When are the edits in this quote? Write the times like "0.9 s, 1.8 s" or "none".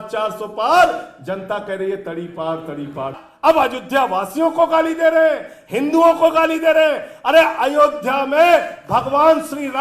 3.2 s